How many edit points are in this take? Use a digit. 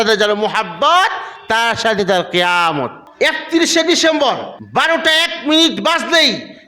2